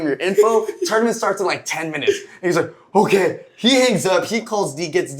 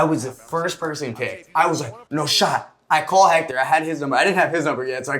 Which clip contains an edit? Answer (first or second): second